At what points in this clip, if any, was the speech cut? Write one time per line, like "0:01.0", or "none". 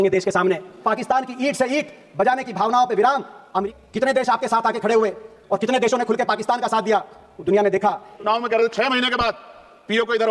0:00.8
0:03.7
0:08.3